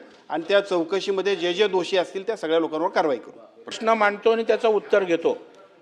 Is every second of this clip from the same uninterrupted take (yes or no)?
no